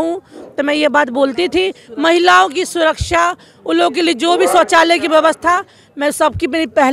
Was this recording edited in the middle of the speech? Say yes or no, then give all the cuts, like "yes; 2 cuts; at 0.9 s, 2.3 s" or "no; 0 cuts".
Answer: no; 0 cuts